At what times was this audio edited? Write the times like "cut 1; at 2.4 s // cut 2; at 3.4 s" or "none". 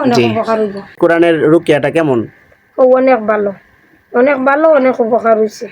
cut 1; at 1.0 s